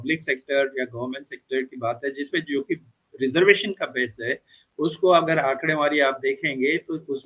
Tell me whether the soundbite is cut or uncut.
uncut